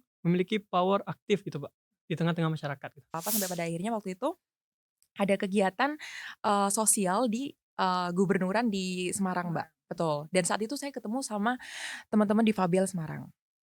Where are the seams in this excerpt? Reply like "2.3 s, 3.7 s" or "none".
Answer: 3.1 s

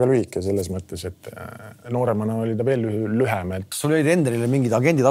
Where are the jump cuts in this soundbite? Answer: 3.6 s

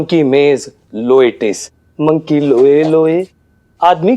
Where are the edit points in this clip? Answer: none

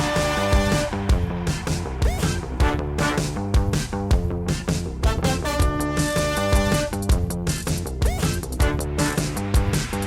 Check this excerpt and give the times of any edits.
9.2 s

